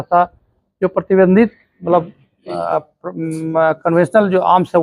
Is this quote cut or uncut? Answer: uncut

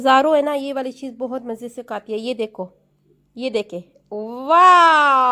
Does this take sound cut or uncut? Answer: uncut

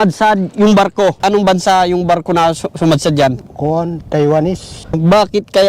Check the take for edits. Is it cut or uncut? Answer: cut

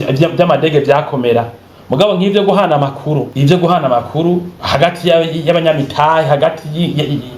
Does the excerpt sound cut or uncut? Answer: cut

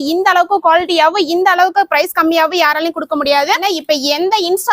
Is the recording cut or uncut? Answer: cut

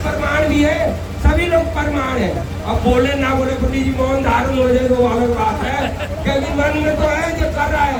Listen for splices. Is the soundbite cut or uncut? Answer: uncut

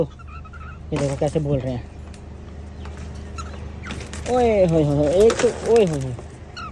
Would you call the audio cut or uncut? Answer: uncut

